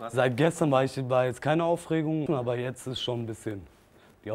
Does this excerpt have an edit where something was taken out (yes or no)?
yes